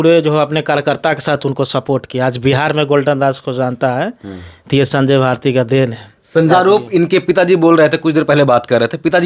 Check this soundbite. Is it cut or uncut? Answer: cut